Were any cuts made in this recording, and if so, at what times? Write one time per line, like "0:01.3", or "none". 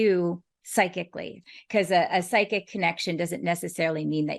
0:01.3